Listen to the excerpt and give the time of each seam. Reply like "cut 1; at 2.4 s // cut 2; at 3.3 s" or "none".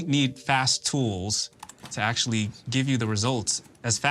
none